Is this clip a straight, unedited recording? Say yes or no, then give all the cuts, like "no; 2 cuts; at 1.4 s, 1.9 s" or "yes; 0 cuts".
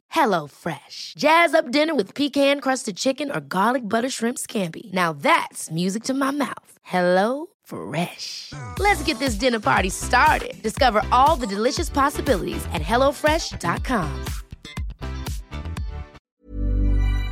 no; 1 cut; at 16.1 s